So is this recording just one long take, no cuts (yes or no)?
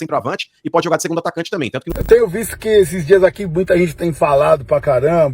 no